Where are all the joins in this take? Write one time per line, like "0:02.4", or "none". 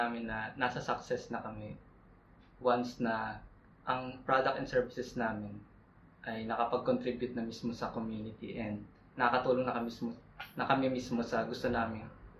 none